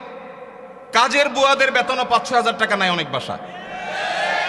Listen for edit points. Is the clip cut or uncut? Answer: uncut